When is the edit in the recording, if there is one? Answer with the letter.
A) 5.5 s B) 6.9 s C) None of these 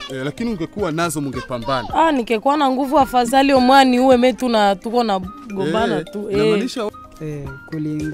B